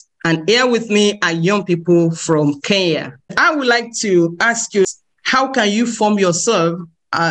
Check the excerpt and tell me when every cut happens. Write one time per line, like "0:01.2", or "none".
0:03.4
0:04.9